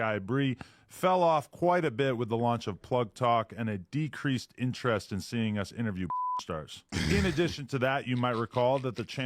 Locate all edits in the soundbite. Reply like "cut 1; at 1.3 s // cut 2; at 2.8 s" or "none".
cut 1; at 8.1 s